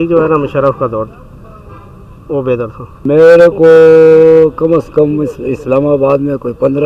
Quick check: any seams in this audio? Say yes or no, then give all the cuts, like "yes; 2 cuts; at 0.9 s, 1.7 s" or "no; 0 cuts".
yes; 1 cut; at 3.1 s